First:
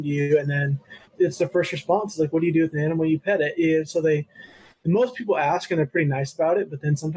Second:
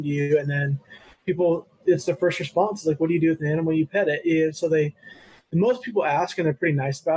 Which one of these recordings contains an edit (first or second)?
first